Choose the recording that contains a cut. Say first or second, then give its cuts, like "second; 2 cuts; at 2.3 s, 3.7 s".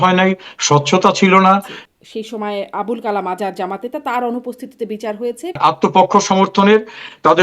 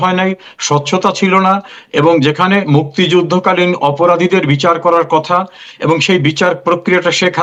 first; 2 cuts; at 1.8 s, 5.6 s